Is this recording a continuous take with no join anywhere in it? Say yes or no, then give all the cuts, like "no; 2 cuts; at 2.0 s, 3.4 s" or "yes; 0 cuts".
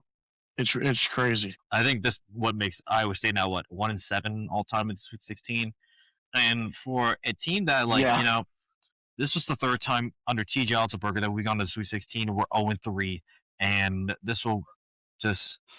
no; 1 cut; at 1.6 s